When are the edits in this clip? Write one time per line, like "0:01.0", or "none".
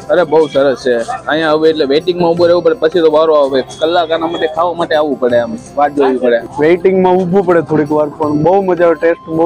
0:06.5